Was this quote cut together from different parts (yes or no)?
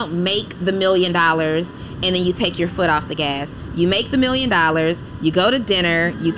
no